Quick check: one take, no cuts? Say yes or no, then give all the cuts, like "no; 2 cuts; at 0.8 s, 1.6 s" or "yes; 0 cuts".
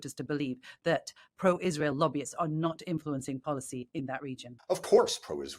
no; 1 cut; at 4.5 s